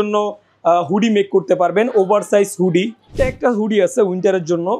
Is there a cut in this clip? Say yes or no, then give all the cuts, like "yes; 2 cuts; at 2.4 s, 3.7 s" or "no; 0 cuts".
yes; 1 cut; at 3.1 s